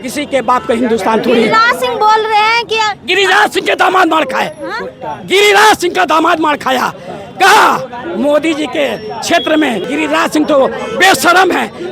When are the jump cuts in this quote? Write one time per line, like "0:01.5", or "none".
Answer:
none

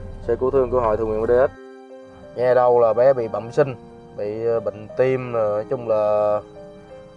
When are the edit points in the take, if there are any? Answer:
0:02.1

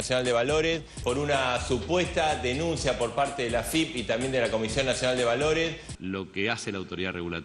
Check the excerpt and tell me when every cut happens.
0:05.9

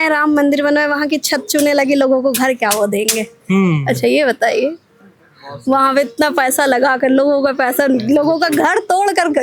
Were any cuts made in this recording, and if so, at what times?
none

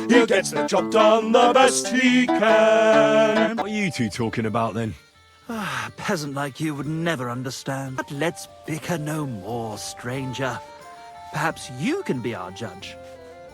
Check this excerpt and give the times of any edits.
0:03.6
0:08.0

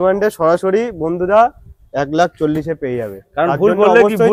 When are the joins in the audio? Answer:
none

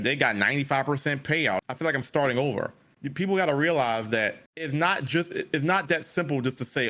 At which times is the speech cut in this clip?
0:01.6
0:04.5

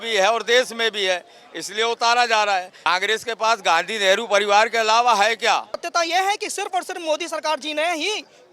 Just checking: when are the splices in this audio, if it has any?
0:02.7
0:05.8

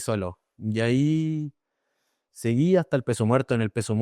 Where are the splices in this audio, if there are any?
none

